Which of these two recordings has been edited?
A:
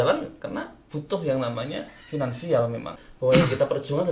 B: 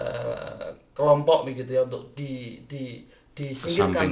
A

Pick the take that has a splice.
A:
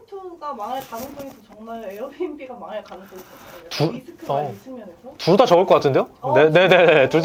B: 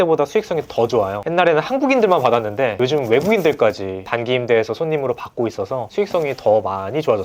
B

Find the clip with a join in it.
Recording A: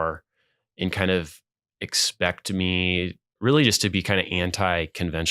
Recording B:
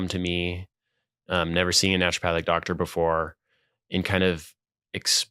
A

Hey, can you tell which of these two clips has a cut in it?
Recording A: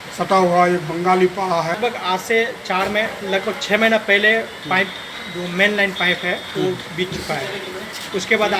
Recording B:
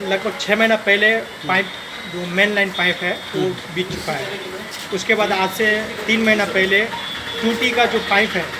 A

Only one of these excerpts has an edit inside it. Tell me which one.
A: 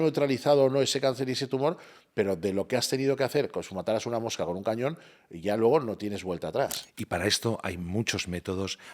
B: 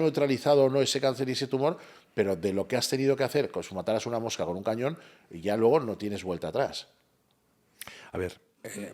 A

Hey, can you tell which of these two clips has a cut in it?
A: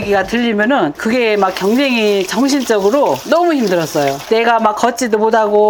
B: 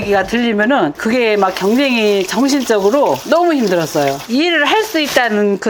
B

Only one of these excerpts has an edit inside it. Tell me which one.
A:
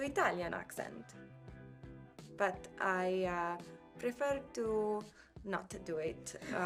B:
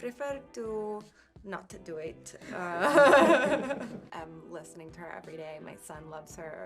B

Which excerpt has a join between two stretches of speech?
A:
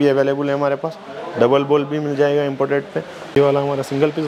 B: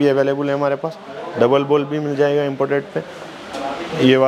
A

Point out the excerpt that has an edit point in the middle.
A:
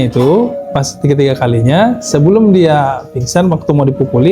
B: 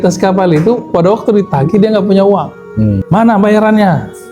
B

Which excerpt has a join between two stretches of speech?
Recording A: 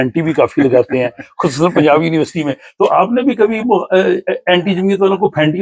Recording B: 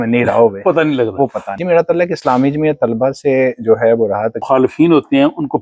B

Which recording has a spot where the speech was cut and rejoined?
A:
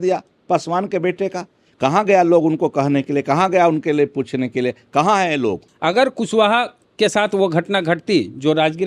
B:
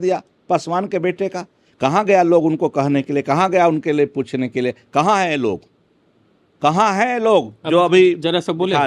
A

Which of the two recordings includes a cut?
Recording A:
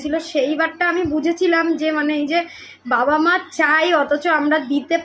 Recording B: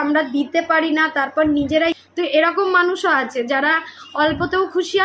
B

